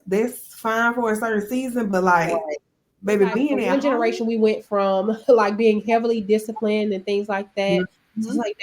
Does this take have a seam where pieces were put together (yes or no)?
yes